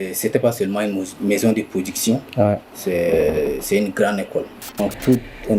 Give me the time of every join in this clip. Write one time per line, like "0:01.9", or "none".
0:04.6